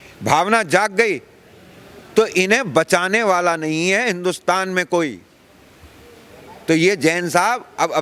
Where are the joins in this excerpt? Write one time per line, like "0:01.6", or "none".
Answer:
none